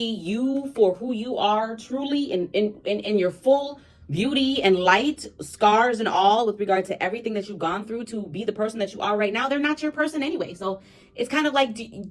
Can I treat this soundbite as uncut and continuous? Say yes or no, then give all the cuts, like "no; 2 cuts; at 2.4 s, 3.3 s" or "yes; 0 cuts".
yes; 0 cuts